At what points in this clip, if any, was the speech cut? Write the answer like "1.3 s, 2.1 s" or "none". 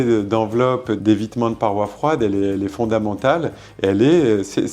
1.0 s